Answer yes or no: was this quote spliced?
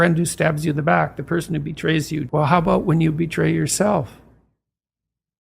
yes